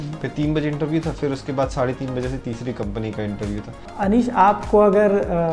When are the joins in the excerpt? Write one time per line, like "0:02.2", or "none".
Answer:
0:03.8